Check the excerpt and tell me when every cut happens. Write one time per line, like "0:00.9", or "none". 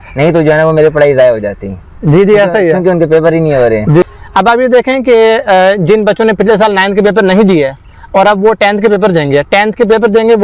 0:04.0